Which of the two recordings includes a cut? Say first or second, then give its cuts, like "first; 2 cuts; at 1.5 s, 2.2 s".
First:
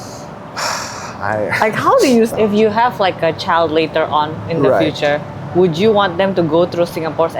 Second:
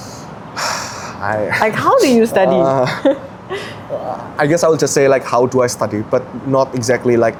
first; 1 cut; at 2.3 s